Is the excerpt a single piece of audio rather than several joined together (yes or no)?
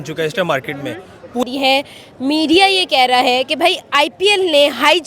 no